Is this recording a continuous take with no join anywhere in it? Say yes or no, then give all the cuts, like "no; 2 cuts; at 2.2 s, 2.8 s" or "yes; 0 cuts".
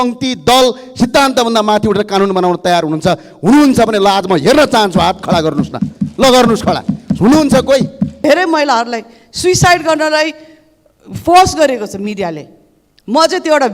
no; 1 cut; at 8.2 s